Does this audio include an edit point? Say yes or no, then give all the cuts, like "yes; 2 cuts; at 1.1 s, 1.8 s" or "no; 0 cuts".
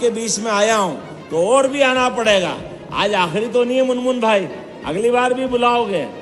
no; 0 cuts